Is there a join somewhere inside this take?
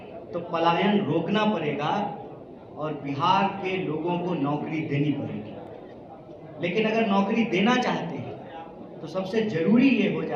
no; 0 cuts

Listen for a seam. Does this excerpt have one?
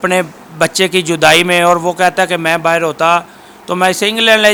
no; 0 cuts

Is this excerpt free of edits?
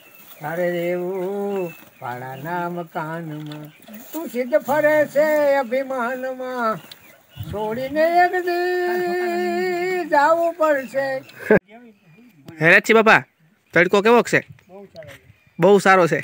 no; 1 cut; at 11.6 s

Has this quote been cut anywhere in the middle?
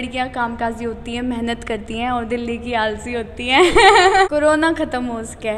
yes; 1 cut; at 4.3 s

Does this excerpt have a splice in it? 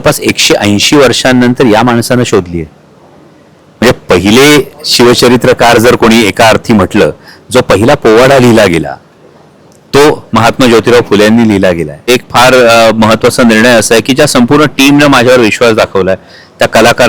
yes; 1 cut; at 12.1 s

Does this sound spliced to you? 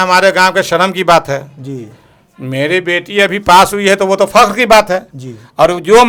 no; 0 cuts

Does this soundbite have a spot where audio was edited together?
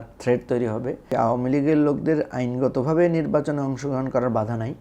yes; 1 cut; at 1.1 s

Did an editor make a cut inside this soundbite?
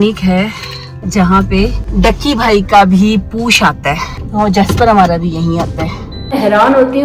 yes; 4 cuts; at 1.0 s, 1.8 s, 4.1 s, 6.3 s

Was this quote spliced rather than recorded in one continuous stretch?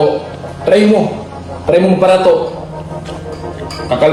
no; 0 cuts

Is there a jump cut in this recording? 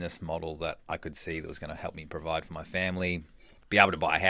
no; 0 cuts

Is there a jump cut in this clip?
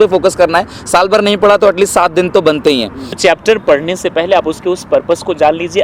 yes; 1 cut; at 3.0 s

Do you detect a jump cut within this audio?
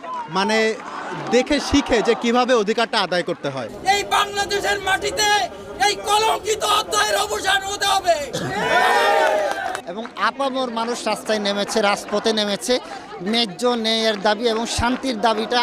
yes; 2 cuts; at 3.7 s, 9.8 s

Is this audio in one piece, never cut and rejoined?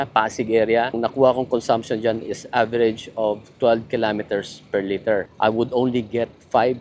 no; 2 cuts; at 0.9 s, 5.3 s

